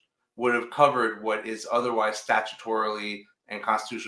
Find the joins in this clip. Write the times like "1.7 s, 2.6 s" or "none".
none